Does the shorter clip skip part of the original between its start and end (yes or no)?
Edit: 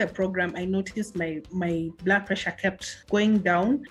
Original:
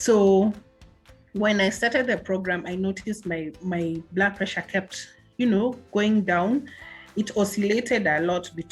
yes